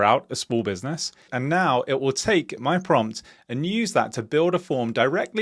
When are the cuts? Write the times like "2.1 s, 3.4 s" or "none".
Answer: 1.2 s